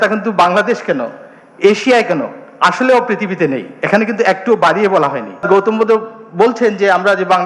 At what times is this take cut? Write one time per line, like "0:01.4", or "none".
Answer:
0:05.4

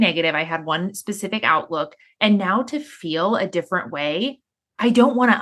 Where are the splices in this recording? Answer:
0:04.5

